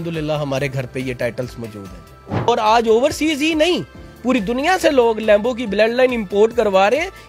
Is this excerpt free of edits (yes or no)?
no